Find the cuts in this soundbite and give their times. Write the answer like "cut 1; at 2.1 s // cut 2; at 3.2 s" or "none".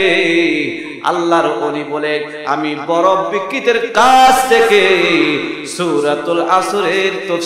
none